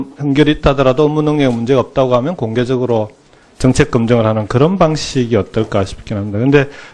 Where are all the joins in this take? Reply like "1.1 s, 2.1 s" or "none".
4.7 s